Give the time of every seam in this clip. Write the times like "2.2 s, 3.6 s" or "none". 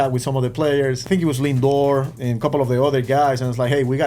1.0 s, 2.1 s